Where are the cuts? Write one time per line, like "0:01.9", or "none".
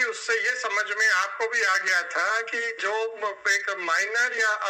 none